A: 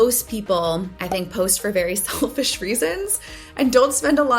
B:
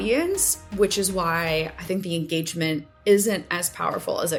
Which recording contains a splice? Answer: A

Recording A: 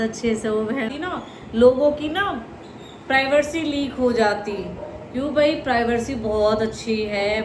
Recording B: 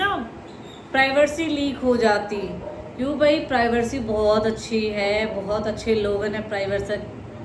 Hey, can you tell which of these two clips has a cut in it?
A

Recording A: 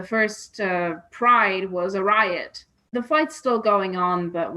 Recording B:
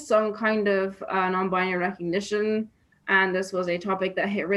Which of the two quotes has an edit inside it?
A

